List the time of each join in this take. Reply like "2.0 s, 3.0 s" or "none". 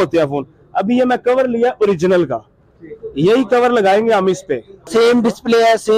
4.9 s